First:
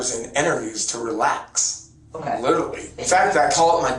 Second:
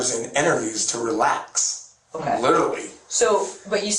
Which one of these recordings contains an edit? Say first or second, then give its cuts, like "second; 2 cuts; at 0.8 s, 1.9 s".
first; 1 cut; at 3.0 s